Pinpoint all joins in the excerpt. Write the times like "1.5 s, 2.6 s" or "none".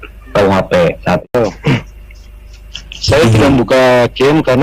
1.3 s

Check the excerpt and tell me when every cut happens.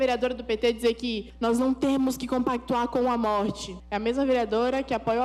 none

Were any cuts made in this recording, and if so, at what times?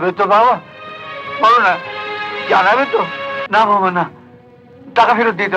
3.4 s

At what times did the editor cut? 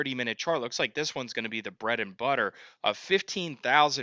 none

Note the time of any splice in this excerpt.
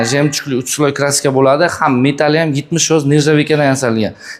none

